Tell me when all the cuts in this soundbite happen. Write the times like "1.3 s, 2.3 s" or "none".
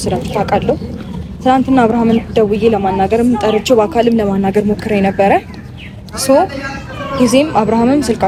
none